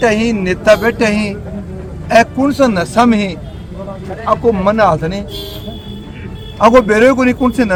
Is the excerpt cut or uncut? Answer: uncut